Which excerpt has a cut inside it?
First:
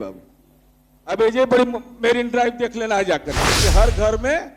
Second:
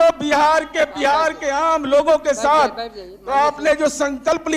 first; 1 cut; at 3.6 s

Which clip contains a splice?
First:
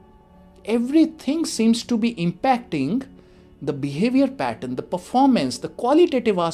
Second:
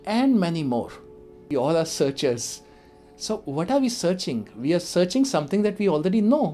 second; 1 cut; at 1.3 s

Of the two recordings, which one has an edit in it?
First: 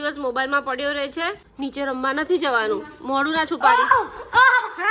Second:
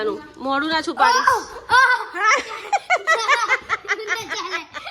first; 1 cut; at 1.4 s

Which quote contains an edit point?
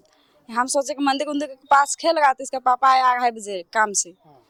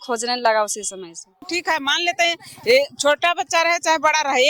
second; 1 cut; at 1.5 s

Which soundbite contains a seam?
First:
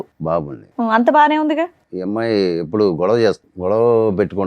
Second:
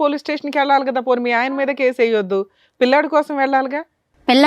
first; 2 cuts; at 1.9 s, 3.5 s

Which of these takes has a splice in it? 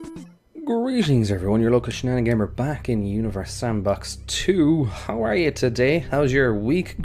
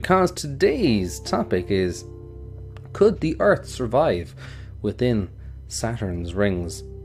first; 1 cut; at 3.4 s

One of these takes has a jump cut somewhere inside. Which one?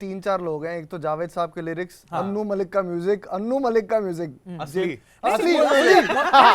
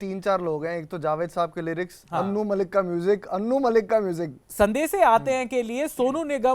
second; 1 cut; at 4.4 s

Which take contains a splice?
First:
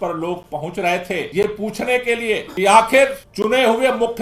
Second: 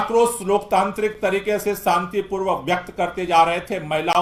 first; 3 cuts; at 1.3 s, 2.5 s, 3.3 s

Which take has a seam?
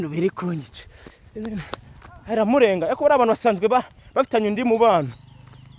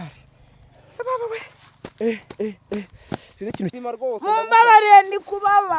second; 1 cut; at 3.8 s

